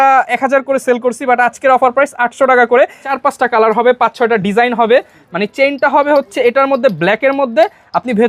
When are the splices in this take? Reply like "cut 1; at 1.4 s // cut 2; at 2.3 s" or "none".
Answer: cut 1; at 3.1 s